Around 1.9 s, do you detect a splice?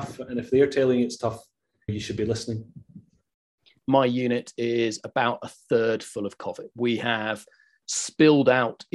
yes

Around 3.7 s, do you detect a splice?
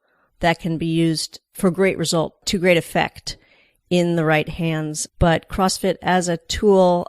no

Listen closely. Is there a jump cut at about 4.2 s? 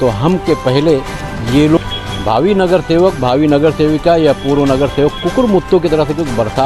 no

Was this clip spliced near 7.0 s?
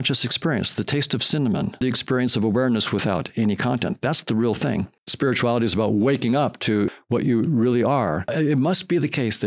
yes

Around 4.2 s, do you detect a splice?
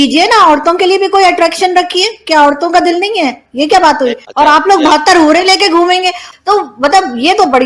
yes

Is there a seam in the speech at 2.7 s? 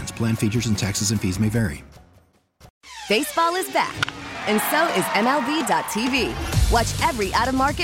yes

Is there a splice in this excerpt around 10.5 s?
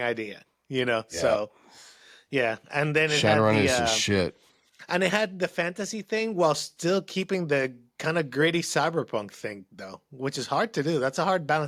no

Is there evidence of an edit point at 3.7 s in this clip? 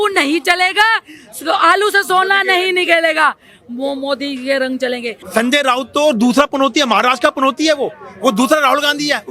no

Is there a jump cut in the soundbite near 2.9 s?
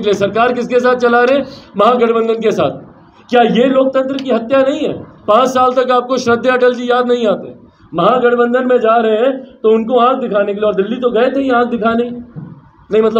no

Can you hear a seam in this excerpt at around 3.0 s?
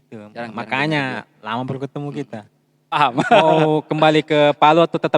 yes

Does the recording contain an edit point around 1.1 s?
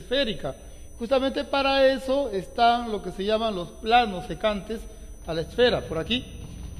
yes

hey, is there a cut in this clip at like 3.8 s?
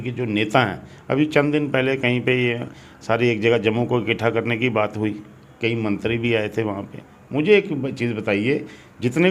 no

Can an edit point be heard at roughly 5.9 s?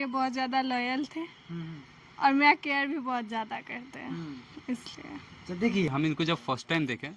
yes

